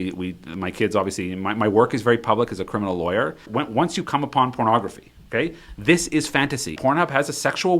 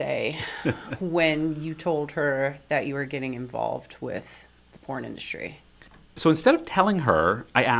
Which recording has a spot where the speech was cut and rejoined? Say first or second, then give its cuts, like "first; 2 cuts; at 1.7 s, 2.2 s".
first; 2 cuts; at 3.5 s, 6.8 s